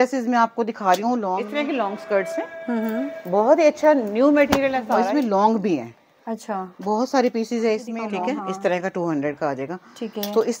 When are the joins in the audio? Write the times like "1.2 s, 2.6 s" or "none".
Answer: 1.4 s, 4.8 s, 8.0 s